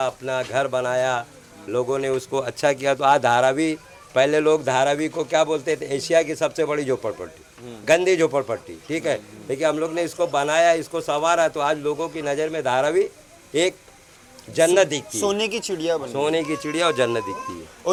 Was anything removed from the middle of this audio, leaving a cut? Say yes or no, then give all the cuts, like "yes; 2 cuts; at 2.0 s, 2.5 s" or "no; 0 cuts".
no; 0 cuts